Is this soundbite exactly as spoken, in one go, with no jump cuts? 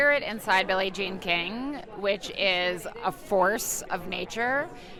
yes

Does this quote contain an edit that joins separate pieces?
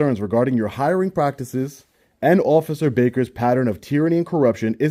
no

